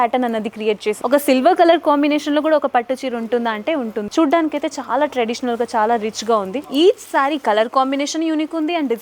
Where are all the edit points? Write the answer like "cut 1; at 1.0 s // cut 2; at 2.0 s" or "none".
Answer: cut 1; at 1.0 s // cut 2; at 4.1 s // cut 3; at 6.6 s